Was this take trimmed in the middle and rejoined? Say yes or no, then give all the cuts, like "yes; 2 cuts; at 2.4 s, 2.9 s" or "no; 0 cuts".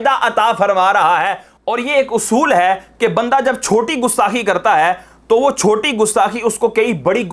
yes; 1 cut; at 1.5 s